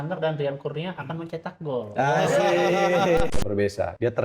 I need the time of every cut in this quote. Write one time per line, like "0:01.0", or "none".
0:03.3